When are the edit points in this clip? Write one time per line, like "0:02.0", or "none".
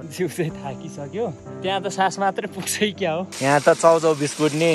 0:01.5
0:03.3